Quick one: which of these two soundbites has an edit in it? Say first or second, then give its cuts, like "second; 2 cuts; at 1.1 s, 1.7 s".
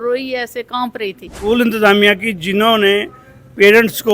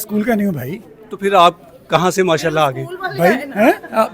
first; 1 cut; at 1.5 s